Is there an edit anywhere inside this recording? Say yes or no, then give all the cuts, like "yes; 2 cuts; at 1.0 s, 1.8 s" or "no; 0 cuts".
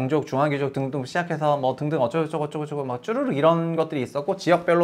no; 0 cuts